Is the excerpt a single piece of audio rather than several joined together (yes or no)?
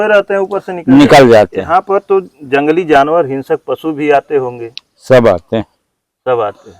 no